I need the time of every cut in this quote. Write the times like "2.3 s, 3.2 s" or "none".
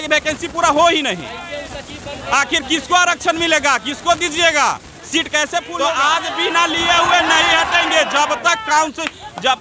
5.7 s